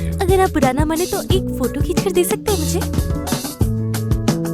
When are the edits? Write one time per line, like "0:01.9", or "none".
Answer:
0:03.4